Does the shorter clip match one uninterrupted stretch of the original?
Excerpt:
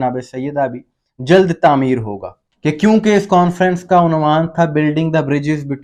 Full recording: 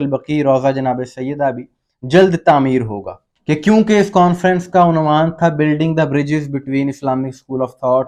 yes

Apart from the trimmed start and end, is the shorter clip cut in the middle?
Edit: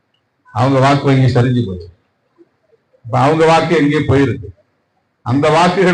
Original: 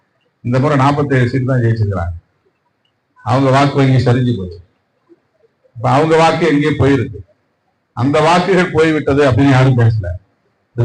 no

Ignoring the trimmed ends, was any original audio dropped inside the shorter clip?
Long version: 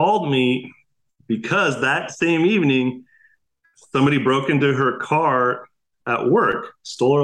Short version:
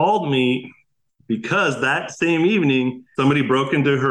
yes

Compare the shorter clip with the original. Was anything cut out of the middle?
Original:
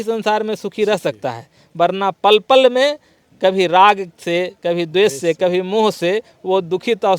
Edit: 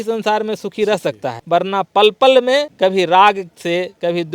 yes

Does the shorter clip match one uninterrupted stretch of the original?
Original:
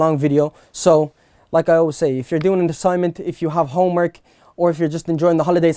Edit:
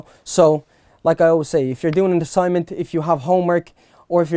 yes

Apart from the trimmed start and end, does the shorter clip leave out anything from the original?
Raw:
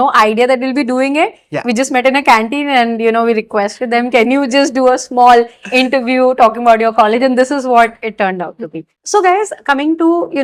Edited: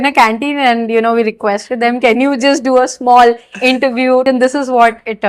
yes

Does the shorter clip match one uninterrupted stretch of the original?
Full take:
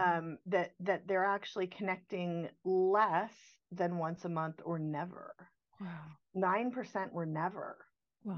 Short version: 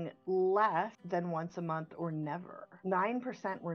no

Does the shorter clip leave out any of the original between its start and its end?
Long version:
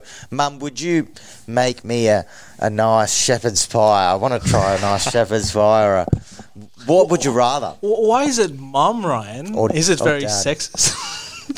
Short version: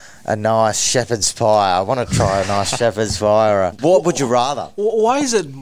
yes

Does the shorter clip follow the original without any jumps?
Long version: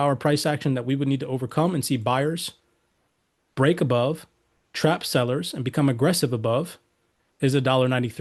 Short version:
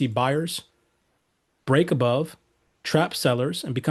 yes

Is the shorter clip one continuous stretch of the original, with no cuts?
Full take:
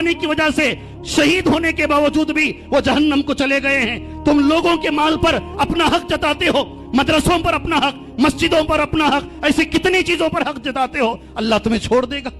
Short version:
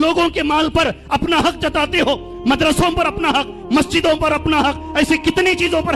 yes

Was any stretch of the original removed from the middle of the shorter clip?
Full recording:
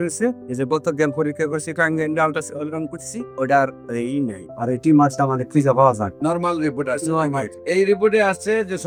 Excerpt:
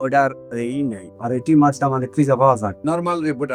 no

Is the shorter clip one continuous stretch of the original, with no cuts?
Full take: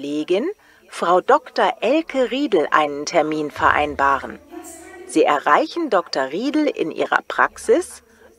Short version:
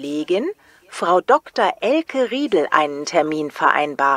yes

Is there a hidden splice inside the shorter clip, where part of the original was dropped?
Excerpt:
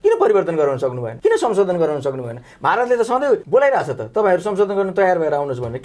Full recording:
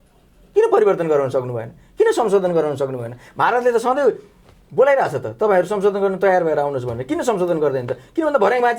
yes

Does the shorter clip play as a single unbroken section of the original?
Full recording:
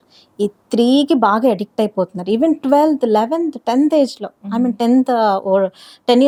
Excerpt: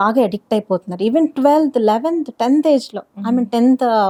yes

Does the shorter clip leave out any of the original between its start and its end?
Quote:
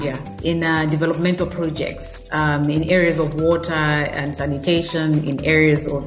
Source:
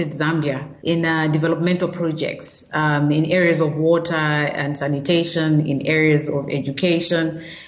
no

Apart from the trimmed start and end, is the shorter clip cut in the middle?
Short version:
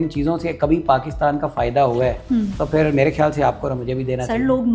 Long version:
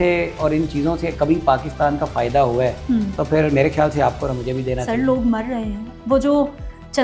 no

